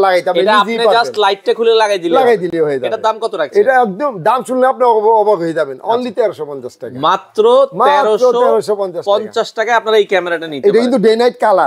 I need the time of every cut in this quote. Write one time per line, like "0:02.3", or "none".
none